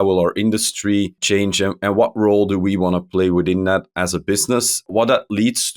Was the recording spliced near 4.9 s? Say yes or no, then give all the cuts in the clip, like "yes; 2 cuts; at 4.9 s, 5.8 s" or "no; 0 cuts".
yes; 2 cuts; at 1.2 s, 4.9 s